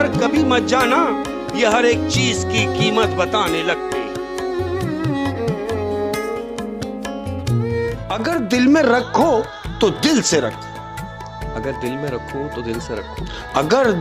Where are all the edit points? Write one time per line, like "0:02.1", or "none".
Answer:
0:08.0